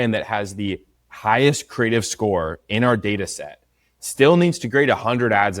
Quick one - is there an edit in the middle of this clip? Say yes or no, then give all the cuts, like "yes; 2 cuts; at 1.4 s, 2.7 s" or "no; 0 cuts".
no; 0 cuts